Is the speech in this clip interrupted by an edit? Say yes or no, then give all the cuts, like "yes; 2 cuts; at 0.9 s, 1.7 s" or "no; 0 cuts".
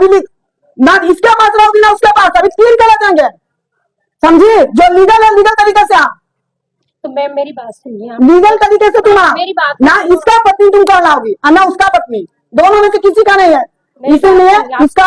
no; 0 cuts